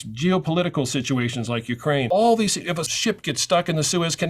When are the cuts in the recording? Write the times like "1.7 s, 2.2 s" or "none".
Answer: 2.1 s, 2.9 s